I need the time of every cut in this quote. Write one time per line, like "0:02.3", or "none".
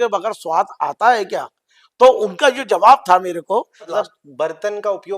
0:03.9

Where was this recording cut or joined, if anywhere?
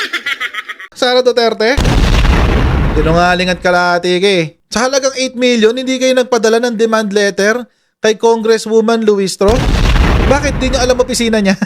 0:00.9

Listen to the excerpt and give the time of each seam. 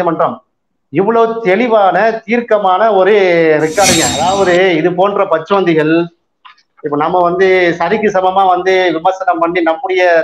0:04.1

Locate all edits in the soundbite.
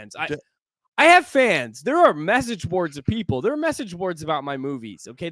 none

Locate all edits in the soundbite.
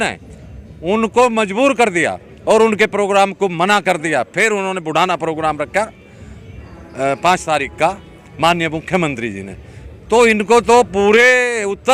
none

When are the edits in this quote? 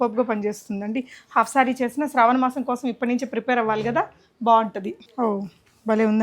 0:05.0

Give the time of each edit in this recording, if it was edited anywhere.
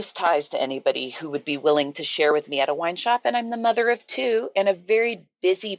none

